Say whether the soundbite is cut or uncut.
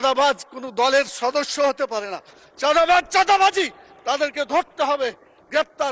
uncut